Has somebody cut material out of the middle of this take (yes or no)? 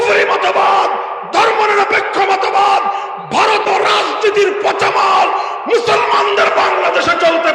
yes